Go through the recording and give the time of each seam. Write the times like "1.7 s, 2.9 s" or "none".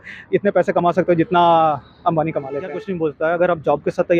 2.8 s

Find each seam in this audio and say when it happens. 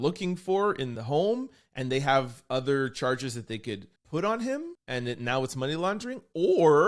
0.9 s, 3.9 s, 4.8 s

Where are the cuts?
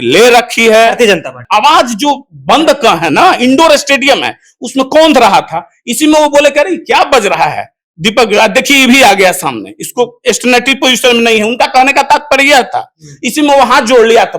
1.4 s

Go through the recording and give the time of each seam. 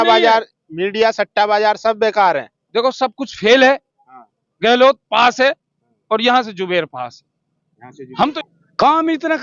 8.3 s

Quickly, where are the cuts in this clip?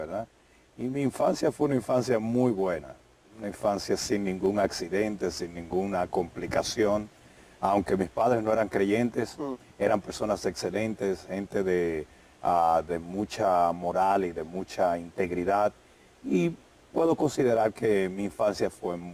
3.8 s

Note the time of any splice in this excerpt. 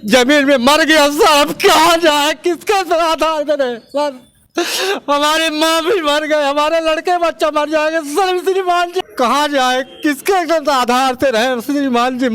9.0 s

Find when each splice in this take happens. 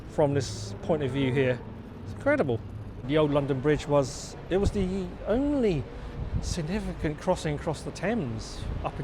3.1 s

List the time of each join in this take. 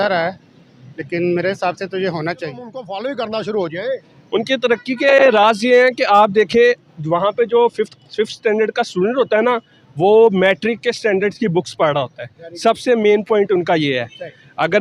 2.8 s

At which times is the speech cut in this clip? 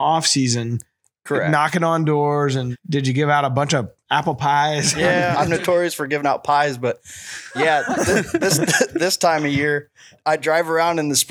2.7 s, 5.3 s, 10.1 s

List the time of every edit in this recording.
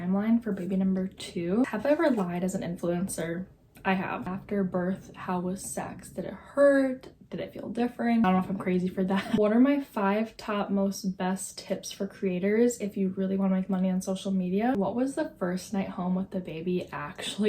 1.7 s, 4.2 s, 8.8 s, 14.7 s

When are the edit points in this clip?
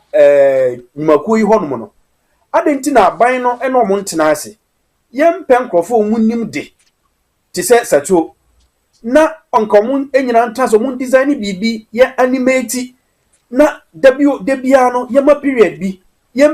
none

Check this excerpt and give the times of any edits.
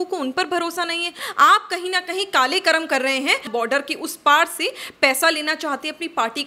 1.2 s, 3.5 s

